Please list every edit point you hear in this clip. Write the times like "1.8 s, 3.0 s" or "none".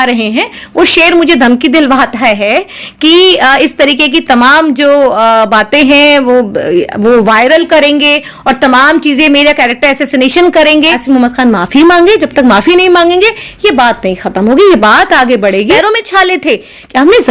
10.9 s, 15.6 s